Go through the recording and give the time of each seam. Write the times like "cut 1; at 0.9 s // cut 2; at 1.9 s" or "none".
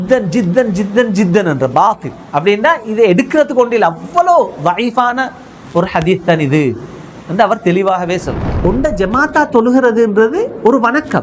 cut 1; at 8.4 s